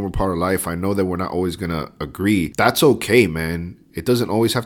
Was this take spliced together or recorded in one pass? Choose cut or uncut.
cut